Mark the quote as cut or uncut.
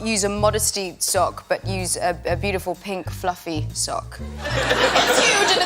uncut